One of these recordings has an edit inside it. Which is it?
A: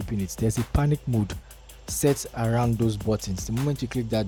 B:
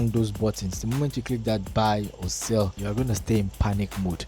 B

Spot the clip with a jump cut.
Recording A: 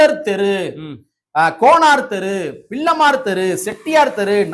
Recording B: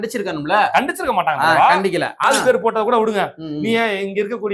B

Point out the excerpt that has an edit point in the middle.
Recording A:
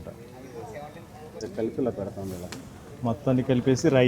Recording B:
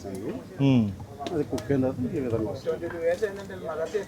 A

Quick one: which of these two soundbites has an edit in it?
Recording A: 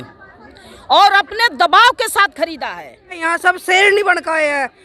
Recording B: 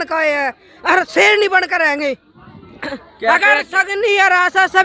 A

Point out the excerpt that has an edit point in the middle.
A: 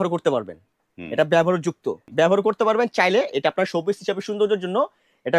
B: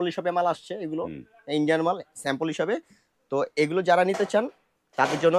A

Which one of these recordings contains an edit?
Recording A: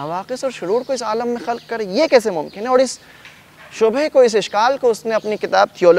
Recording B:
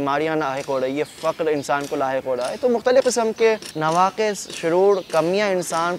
B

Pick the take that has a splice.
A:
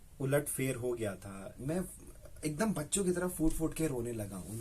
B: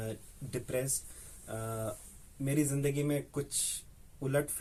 A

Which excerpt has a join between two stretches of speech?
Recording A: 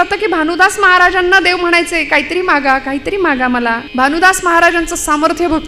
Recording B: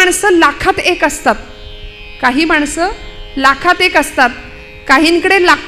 A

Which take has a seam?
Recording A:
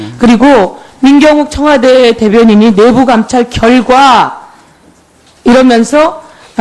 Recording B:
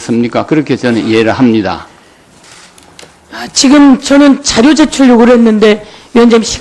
B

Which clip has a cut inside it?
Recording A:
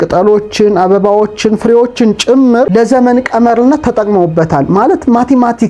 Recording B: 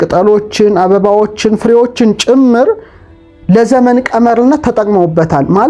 A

